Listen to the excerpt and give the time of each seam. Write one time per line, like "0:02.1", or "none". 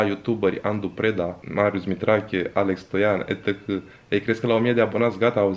0:01.4